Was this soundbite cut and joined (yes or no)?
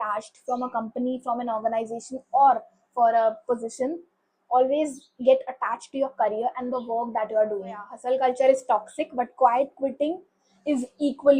yes